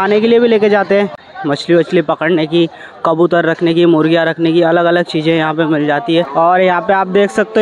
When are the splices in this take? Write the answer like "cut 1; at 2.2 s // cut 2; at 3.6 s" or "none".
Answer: cut 1; at 1.2 s // cut 2; at 6.3 s